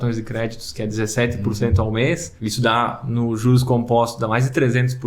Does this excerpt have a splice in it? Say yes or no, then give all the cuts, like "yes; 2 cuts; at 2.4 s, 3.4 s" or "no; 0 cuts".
yes; 1 cut; at 2.3 s